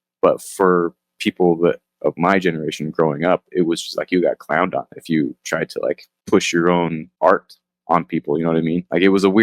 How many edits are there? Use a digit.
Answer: 2